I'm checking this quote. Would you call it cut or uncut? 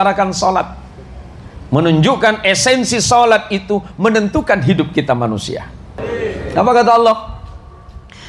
cut